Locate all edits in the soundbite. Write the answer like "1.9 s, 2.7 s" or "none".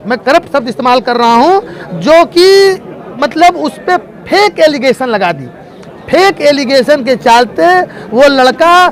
none